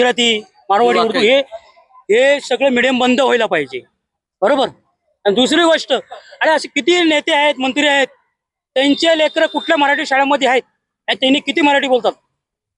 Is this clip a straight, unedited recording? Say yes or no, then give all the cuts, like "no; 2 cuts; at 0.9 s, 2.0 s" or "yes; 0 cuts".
yes; 0 cuts